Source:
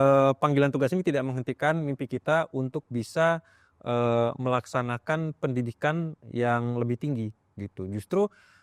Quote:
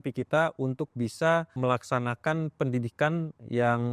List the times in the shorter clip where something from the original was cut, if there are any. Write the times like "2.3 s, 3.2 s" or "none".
1.5 s